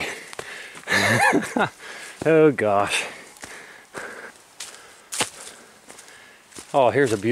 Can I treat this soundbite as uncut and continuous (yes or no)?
no